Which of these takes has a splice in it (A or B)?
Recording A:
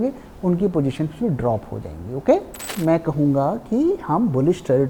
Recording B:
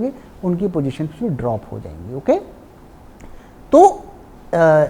A